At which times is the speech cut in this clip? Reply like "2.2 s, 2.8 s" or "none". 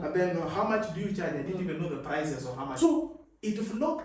2.7 s